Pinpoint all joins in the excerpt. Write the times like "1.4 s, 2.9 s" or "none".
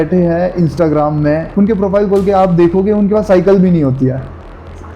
1.5 s